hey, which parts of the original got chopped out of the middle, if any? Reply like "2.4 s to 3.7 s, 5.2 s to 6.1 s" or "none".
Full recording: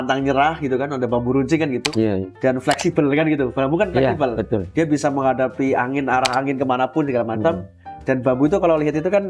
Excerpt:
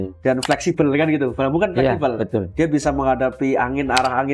none